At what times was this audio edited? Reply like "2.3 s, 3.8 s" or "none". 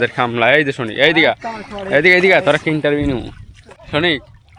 none